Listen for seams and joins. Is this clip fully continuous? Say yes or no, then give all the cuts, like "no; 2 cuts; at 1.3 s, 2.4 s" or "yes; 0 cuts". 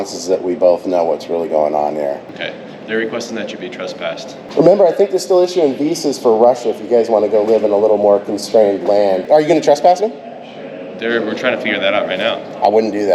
no; 3 cuts; at 2.3 s, 4.4 s, 9.2 s